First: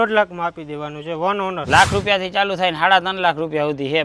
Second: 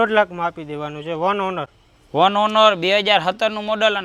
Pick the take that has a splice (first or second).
first